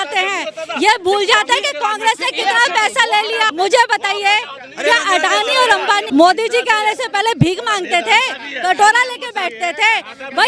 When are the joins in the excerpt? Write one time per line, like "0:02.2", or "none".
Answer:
0:03.5
0:06.0